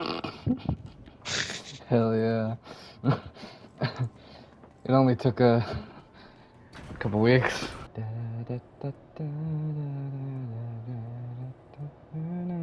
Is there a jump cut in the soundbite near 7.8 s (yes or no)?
yes